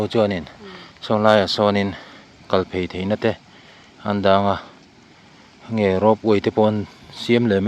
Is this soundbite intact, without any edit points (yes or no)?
yes